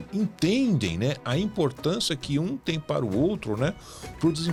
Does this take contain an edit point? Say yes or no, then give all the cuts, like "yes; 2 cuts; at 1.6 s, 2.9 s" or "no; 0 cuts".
no; 0 cuts